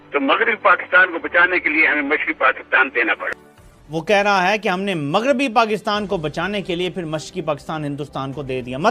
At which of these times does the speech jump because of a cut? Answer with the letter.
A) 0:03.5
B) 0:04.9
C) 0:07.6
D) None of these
A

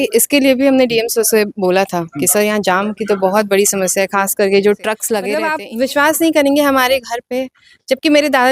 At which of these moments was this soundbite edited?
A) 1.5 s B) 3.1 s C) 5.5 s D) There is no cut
C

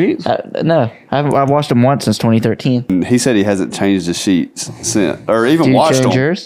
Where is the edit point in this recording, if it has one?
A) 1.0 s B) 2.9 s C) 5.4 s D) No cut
B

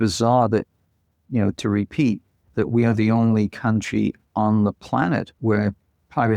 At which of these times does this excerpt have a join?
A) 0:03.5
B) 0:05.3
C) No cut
B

